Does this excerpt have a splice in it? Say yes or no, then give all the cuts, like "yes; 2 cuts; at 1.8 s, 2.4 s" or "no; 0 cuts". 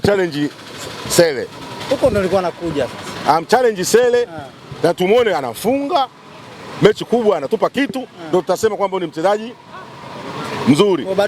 no; 0 cuts